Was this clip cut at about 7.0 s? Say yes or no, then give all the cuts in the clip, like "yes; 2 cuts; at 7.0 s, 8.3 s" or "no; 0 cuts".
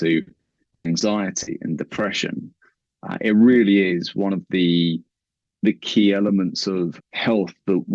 yes; 1 cut; at 7.0 s